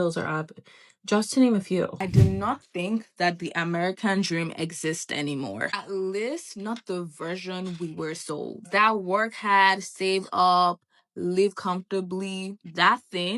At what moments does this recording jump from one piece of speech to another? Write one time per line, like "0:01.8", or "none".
0:02.0